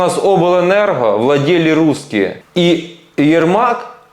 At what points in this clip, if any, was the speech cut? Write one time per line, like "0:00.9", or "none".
0:02.4